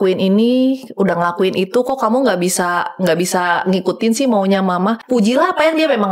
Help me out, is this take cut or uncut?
cut